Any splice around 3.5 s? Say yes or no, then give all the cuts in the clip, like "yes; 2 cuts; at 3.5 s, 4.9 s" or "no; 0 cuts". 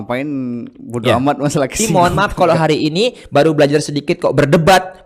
no; 1 cut; at 1.8 s